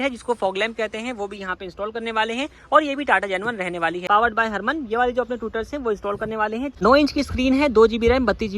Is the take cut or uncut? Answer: cut